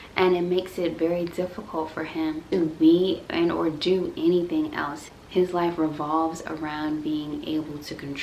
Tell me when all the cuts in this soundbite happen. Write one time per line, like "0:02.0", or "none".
none